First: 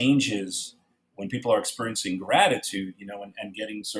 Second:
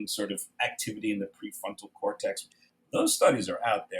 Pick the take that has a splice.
second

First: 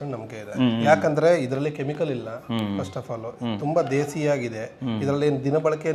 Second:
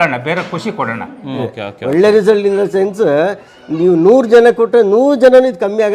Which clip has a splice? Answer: second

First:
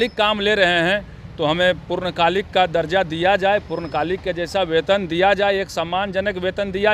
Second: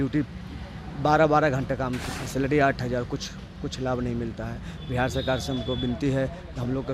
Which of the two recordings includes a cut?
second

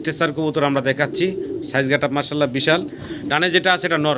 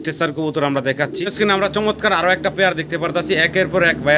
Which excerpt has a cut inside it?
second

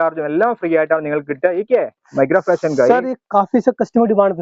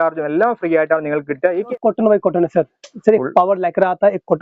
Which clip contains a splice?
second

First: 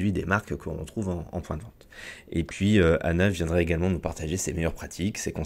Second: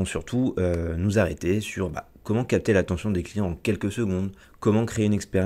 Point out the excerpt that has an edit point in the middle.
second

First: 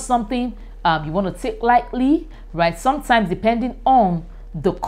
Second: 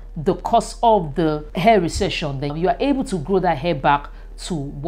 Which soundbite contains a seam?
second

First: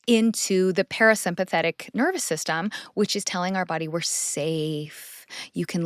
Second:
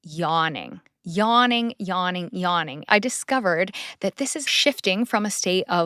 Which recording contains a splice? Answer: second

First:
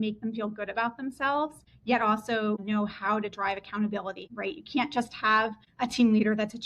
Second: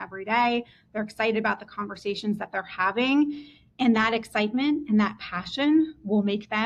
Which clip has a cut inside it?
first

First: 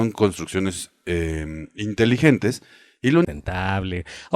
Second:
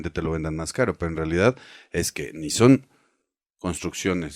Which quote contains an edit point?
first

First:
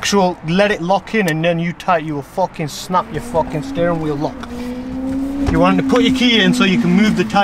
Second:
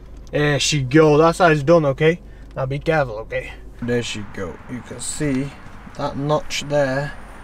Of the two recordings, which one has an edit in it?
second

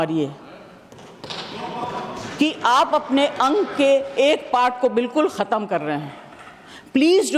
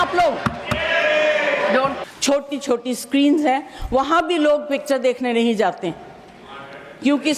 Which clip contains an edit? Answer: second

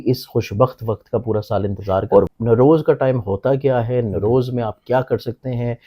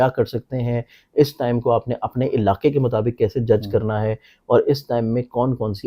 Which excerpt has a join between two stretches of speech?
first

